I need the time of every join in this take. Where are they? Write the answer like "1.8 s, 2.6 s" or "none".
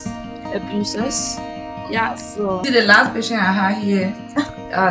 2.6 s